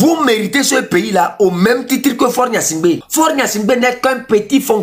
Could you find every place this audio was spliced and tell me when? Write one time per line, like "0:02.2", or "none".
0:03.1